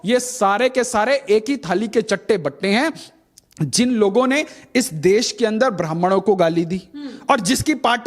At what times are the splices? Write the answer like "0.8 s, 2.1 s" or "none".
none